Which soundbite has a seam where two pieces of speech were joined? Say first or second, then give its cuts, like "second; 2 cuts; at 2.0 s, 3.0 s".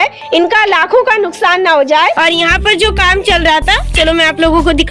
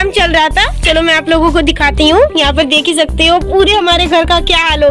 first; 1 cut; at 2.2 s